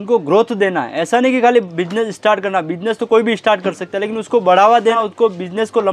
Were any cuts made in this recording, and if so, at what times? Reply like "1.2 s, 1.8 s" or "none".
4.9 s

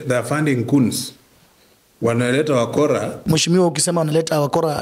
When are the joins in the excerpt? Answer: 3.2 s

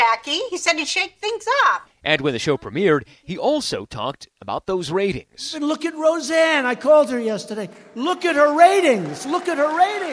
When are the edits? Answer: none

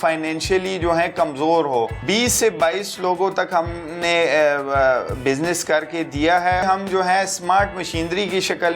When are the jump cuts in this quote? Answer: 2.0 s, 6.6 s

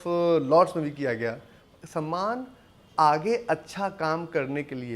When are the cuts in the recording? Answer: 1.6 s

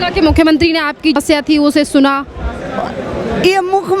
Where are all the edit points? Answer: 1.2 s

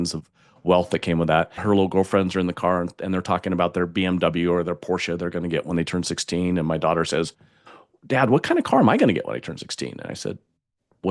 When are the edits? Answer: 1.6 s

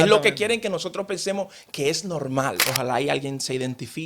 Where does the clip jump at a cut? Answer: 2.6 s

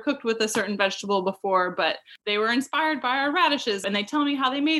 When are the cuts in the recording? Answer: 2.1 s, 3.8 s

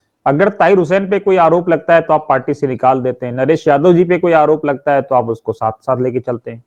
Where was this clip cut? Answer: none

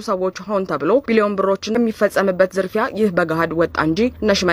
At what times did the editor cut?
1.8 s

